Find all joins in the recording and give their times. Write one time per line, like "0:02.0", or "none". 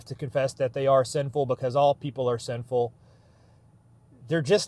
none

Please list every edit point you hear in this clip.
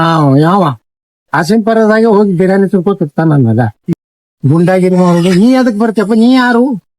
0:03.9

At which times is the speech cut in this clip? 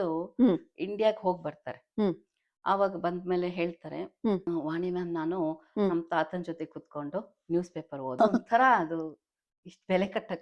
0:04.4
0:08.1

